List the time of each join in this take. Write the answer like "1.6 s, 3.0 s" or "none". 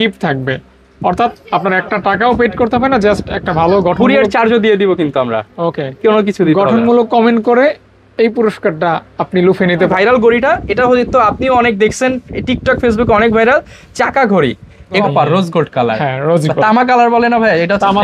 9.9 s, 15.0 s